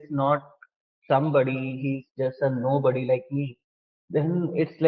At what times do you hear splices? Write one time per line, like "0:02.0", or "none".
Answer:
none